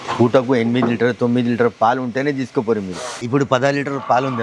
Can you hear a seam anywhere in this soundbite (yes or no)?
yes